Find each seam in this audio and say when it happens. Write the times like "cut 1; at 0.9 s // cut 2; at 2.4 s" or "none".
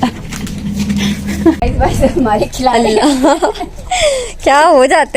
cut 1; at 1.6 s